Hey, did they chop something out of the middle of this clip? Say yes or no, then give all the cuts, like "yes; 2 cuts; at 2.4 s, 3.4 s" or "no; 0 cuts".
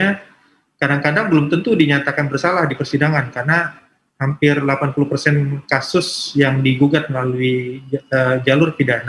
no; 0 cuts